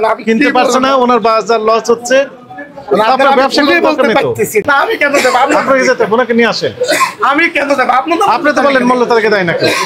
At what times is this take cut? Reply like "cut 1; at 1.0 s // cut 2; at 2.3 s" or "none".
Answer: cut 1; at 4.7 s